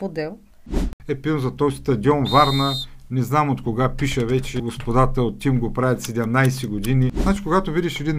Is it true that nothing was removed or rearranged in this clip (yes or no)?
no